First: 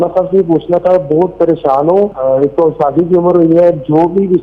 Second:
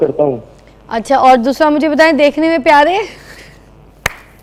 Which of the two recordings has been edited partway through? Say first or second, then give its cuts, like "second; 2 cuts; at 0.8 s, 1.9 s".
first; 1 cut; at 2.2 s